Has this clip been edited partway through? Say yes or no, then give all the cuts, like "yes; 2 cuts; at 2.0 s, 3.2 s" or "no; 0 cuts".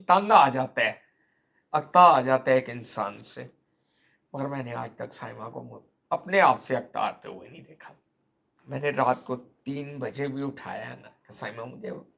no; 0 cuts